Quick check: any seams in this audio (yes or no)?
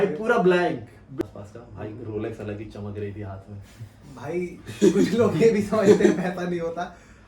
yes